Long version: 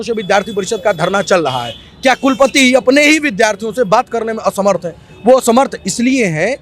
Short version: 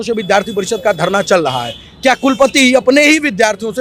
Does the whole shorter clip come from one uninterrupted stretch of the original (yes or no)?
yes